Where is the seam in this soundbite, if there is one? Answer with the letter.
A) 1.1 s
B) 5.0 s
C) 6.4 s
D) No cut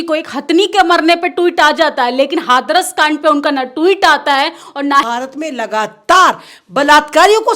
B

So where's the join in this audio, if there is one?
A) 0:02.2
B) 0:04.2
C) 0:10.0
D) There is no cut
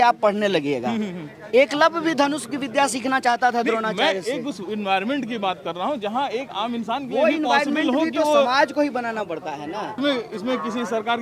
C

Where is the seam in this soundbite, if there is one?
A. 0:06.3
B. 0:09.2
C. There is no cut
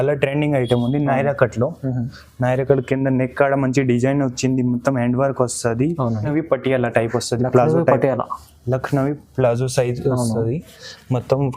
A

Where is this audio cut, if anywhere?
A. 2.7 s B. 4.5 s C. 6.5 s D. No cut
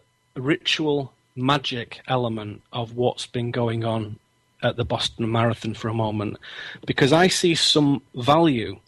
D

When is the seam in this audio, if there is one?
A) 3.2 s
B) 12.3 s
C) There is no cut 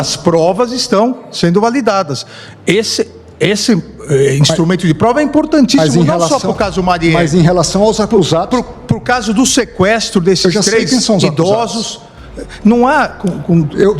C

